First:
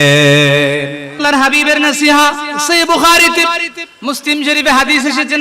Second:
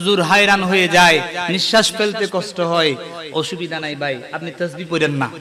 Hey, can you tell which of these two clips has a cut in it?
first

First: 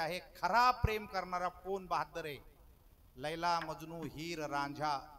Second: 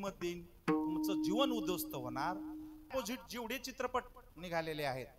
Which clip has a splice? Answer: second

